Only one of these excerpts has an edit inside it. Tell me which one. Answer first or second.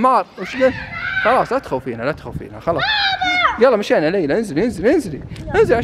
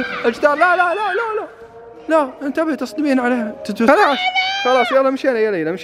second